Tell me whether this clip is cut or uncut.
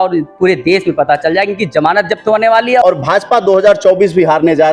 cut